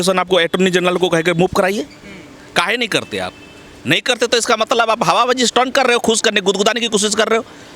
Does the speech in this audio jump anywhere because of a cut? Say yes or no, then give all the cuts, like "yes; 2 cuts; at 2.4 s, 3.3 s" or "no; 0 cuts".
no; 0 cuts